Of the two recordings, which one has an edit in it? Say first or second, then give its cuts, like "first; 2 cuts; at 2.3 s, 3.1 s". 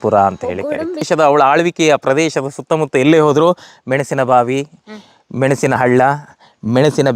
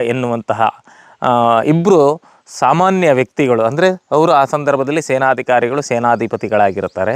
first; 1 cut; at 1.1 s